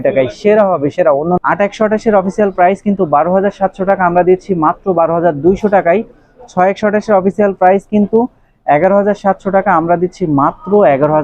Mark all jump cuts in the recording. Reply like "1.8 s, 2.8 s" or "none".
1.4 s